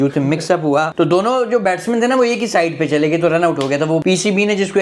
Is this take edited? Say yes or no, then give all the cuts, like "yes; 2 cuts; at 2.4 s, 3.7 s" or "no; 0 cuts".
yes; 2 cuts; at 0.9 s, 4.0 s